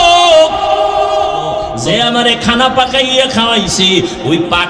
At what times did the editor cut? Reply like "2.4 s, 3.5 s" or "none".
1.7 s